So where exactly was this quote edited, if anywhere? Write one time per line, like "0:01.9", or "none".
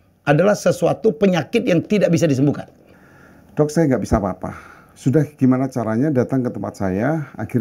0:02.8